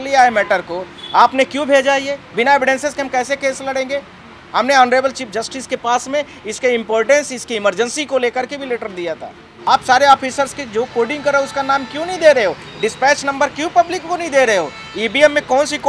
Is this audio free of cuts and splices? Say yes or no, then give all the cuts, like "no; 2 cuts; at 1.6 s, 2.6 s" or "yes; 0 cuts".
no; 1 cut; at 9.5 s